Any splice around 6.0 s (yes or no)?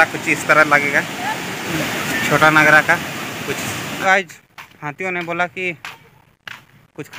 no